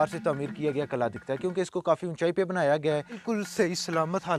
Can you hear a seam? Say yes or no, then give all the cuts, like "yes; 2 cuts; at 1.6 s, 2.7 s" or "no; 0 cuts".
yes; 1 cut; at 3.2 s